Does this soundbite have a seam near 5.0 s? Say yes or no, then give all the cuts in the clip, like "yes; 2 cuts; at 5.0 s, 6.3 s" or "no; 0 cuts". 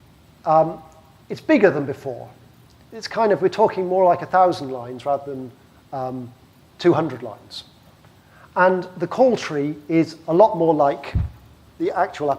no; 1 cut; at 10.2 s